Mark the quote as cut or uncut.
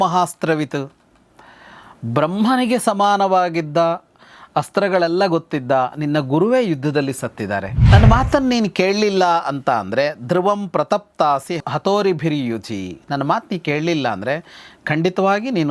cut